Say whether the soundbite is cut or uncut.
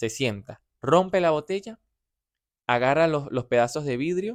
uncut